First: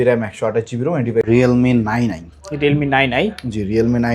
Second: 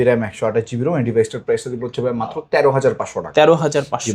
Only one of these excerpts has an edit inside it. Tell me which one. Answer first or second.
first